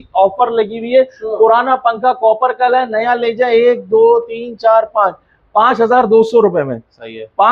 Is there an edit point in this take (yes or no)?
no